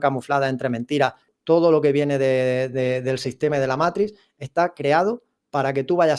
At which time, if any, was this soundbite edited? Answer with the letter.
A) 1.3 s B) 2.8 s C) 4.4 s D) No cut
A